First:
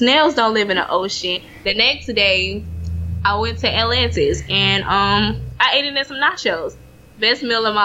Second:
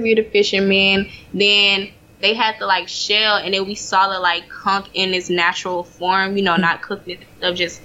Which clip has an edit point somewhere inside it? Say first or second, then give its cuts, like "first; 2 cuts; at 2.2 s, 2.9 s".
first; 1 cut; at 1.5 s